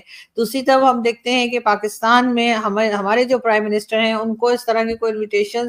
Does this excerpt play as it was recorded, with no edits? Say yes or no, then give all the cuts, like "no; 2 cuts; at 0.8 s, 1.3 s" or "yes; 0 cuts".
yes; 0 cuts